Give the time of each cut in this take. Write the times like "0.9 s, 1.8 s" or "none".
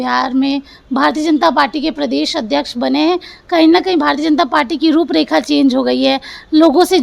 none